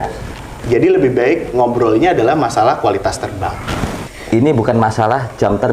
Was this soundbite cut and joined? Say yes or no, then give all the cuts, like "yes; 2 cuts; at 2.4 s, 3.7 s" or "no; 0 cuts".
yes; 1 cut; at 4.0 s